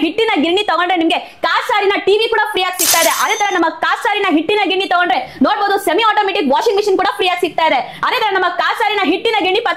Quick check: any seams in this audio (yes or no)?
no